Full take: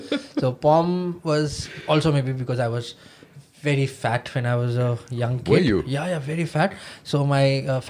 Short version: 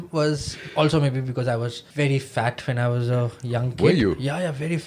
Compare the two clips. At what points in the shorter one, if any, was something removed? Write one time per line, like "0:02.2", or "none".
0:01.8